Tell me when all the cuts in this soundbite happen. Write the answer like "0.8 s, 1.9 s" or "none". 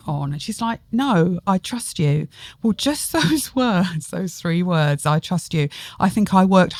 none

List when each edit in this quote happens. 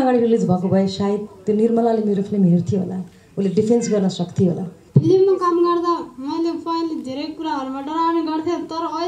4.7 s

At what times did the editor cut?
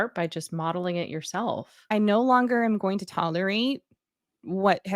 1.7 s

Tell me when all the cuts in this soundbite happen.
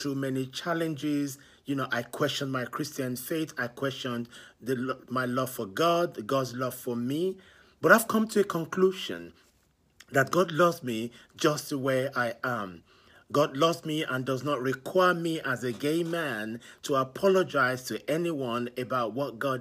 none

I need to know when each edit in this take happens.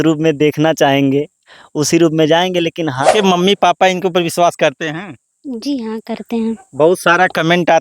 3.0 s

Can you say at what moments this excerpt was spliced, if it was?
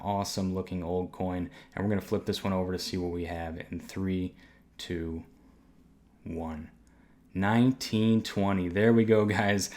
none

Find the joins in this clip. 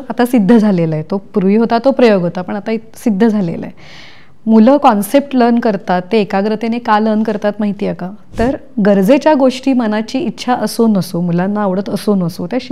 8.2 s

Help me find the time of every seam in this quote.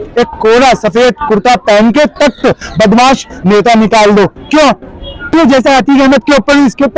5.3 s

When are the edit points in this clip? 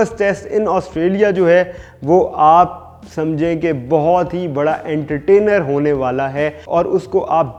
none

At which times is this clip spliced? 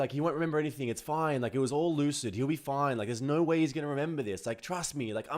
none

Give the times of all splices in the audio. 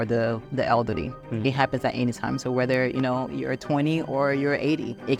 none

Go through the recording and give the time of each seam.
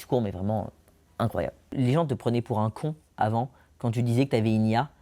1.7 s

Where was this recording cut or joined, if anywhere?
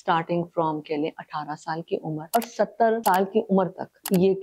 none

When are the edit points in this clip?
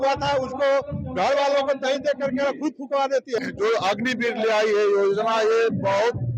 3.4 s

